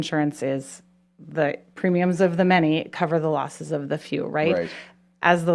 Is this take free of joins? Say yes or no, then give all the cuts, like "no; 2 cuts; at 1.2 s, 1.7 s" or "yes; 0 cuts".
yes; 0 cuts